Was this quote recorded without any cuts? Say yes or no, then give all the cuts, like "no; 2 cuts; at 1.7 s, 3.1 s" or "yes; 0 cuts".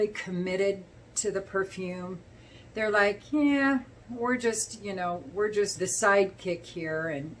no; 1 cut; at 5.7 s